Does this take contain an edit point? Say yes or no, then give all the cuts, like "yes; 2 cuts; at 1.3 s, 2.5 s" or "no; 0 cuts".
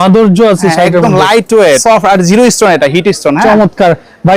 yes; 1 cut; at 1.8 s